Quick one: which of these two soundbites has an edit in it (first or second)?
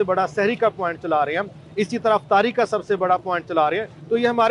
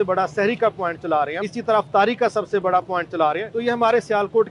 second